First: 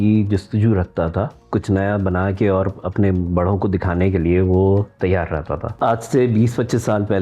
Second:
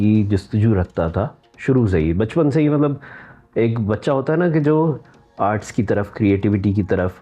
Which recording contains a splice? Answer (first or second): first